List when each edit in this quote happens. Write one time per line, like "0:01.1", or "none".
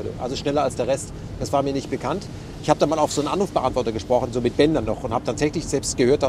none